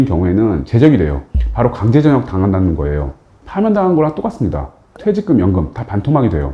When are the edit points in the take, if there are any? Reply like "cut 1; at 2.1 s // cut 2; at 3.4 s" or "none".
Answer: none